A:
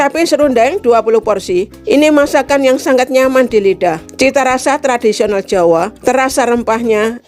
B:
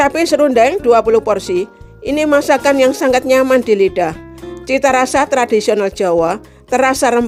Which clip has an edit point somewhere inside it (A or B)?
A